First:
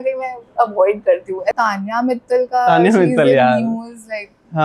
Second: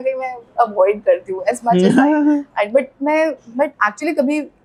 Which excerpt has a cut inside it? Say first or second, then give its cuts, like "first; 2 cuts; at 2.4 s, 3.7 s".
first; 1 cut; at 1.5 s